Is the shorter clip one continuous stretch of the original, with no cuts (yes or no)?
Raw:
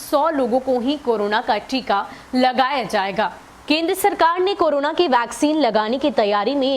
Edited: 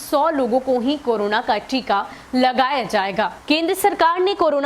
no